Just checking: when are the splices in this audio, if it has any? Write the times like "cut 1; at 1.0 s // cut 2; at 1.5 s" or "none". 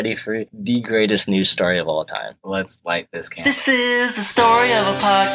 cut 1; at 3.2 s